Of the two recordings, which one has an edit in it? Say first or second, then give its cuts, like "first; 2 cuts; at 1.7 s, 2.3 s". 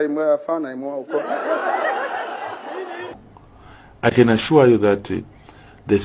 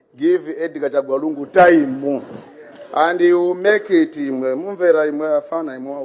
first; 1 cut; at 3.2 s